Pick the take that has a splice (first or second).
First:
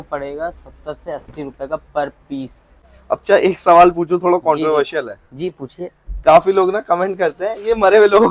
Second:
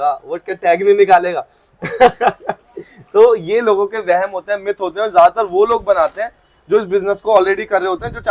first